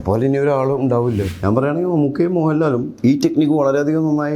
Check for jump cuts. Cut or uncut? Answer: cut